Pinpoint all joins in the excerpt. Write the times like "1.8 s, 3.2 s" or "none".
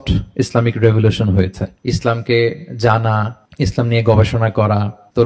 1.7 s